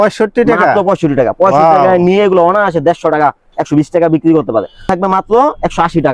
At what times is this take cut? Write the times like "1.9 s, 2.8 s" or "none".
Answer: 4.9 s